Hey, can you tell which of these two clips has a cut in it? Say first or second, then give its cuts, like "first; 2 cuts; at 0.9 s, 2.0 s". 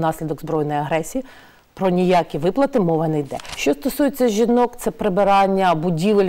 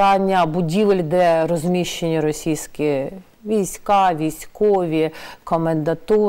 first; 1 cut; at 3.4 s